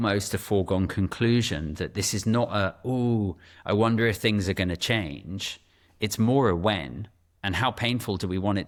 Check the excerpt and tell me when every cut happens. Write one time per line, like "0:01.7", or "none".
none